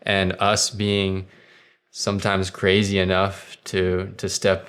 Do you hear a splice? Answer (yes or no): no